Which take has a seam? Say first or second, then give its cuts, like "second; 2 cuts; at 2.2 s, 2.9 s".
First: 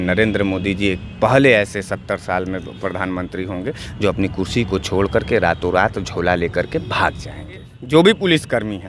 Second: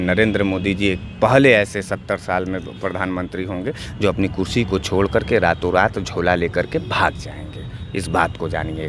first; 1 cut; at 7.7 s